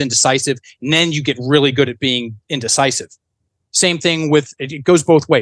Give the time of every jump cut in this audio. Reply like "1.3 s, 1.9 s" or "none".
none